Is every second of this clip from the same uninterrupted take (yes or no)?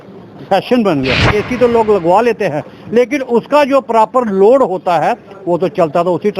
no